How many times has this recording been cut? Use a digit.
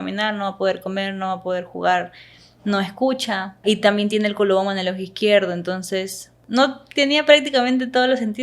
2